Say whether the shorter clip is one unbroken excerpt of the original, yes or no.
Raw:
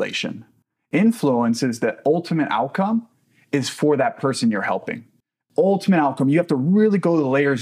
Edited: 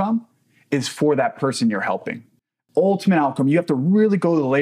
yes